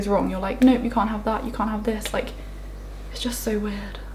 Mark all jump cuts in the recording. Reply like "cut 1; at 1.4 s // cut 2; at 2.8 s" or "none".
none

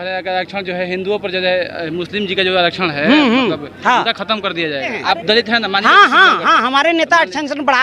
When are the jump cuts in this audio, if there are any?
cut 1; at 5.0 s

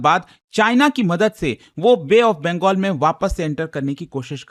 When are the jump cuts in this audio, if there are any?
none

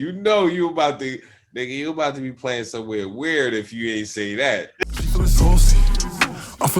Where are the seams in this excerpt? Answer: cut 1; at 4.8 s

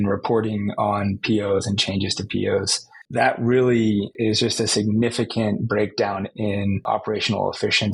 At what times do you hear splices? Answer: cut 1; at 3.0 s // cut 2; at 4.1 s // cut 3; at 6.9 s

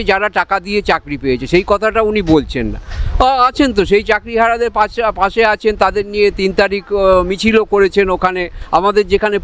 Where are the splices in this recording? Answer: none

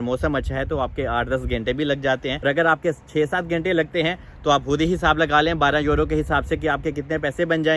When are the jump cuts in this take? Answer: cut 1; at 2.3 s

